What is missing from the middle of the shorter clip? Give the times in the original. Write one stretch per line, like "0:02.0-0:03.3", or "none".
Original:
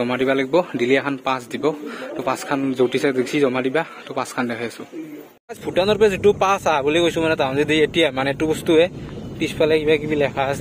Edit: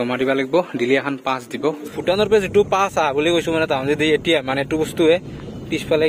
0:01.9-0:05.6